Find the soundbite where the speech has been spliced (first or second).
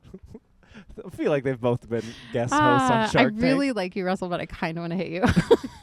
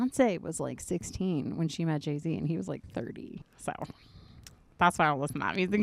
second